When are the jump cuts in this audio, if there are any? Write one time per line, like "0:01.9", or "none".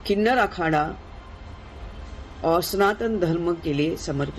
none